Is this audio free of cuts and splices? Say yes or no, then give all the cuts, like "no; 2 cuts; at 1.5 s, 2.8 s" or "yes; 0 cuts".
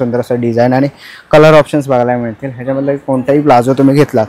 yes; 0 cuts